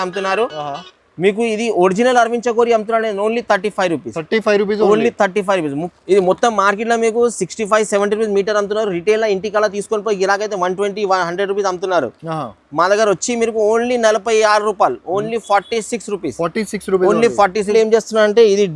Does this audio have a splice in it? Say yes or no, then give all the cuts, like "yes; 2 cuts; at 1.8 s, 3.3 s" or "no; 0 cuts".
yes; 2 cuts; at 5.8 s, 17.7 s